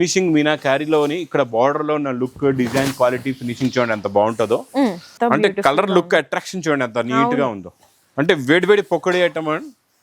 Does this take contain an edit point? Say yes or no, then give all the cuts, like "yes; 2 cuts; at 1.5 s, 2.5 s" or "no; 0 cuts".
yes; 1 cut; at 5.1 s